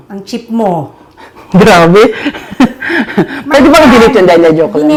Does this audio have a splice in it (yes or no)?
no